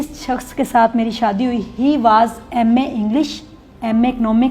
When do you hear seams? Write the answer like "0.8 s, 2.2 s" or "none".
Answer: none